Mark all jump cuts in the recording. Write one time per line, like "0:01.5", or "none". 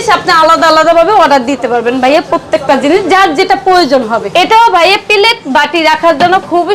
0:04.3